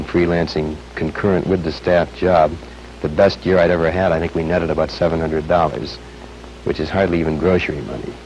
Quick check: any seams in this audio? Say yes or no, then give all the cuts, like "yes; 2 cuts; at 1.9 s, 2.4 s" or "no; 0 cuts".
no; 0 cuts